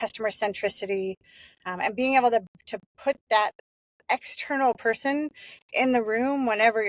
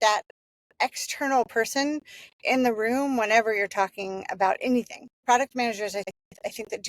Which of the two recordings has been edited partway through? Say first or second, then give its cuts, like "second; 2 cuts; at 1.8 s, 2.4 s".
second; 2 cuts; at 5.1 s, 6.1 s